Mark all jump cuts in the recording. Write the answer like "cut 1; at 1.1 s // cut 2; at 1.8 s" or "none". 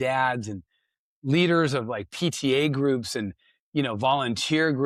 none